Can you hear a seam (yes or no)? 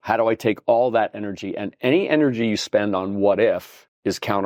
no